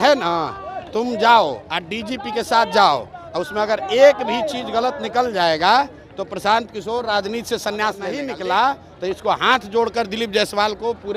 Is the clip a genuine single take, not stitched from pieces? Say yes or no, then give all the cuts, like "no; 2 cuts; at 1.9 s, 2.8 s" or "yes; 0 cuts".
no; 1 cut; at 8.1 s